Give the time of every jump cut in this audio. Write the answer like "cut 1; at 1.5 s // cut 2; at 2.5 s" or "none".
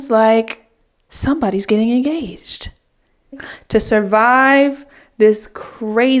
cut 1; at 3.5 s